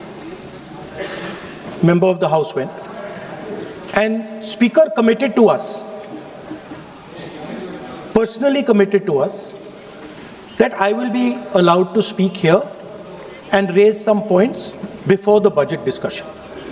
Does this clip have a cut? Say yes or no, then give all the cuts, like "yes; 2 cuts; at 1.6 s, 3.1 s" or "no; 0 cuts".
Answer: no; 0 cuts